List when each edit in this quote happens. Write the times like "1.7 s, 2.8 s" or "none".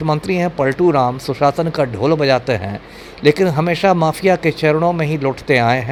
none